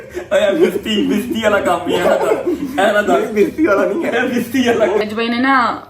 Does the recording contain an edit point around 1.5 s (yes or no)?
no